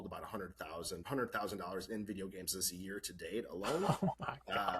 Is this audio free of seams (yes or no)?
no